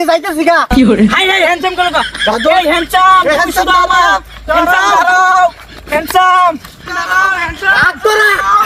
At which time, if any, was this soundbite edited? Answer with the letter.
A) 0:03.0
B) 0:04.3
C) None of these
C